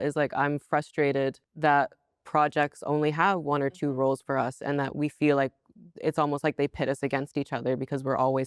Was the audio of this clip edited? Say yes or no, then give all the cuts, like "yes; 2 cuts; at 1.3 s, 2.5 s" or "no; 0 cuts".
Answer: no; 0 cuts